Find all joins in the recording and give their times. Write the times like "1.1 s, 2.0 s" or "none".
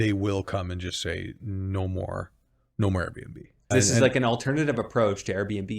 3.7 s